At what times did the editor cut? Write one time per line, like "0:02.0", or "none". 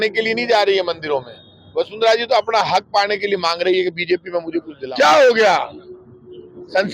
0:04.7